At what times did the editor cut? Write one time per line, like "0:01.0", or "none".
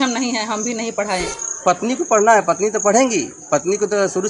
0:01.4